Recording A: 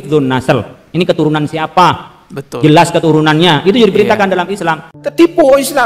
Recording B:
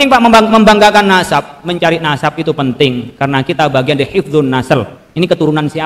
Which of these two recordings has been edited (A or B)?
A